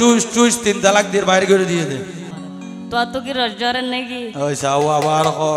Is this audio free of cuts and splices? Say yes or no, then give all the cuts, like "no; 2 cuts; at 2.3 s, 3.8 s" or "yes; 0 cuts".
no; 1 cut; at 2.2 s